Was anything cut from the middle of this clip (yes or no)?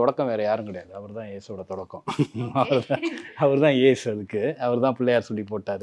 no